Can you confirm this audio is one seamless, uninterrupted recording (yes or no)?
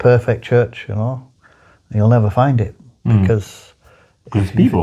yes